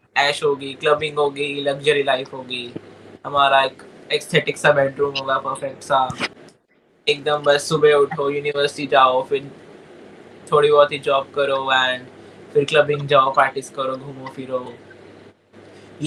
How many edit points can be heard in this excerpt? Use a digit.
0